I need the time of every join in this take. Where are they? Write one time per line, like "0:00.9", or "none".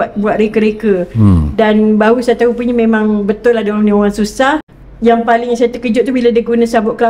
0:04.7